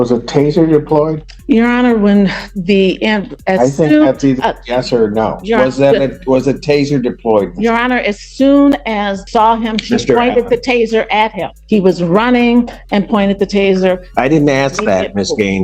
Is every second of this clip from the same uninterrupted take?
no; 3 cuts; at 1.3 s, 9.2 s, 11.5 s

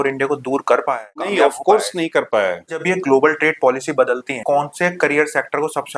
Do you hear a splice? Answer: yes; 3 cuts; at 1.3 s, 2.8 s, 4.4 s

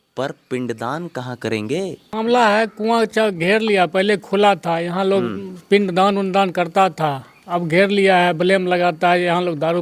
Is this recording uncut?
no; 1 cut; at 2.0 s

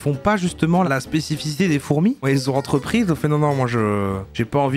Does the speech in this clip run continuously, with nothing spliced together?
no; 2 cuts; at 0.9 s, 2.2 s

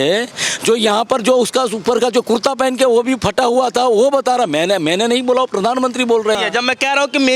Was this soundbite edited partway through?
yes; 1 cut; at 6.4 s

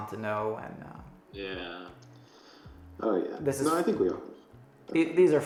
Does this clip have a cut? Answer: no; 0 cuts

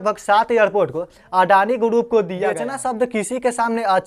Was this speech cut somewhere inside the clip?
yes; 1 cut; at 2.7 s

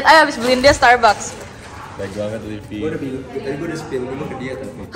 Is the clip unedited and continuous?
yes; 0 cuts

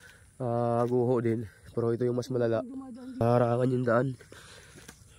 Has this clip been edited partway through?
yes; 1 cut; at 3.2 s

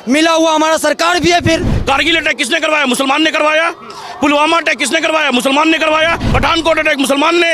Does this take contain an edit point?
yes; 2 cuts; at 1.7 s, 6.2 s

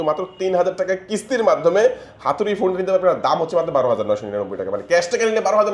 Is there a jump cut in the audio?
no; 0 cuts

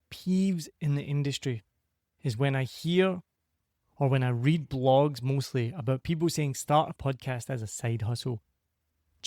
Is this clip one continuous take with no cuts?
yes; 0 cuts

